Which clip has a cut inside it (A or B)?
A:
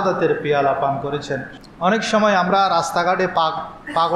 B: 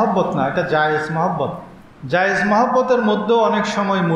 A